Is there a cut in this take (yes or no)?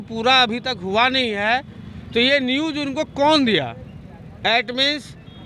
no